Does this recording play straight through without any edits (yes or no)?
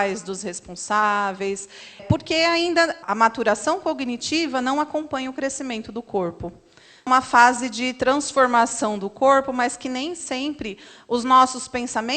no